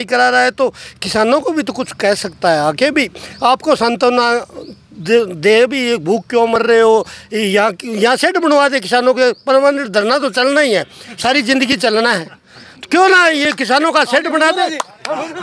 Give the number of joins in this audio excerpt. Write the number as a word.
zero